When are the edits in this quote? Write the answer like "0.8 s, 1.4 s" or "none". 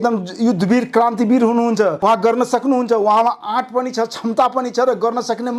2.0 s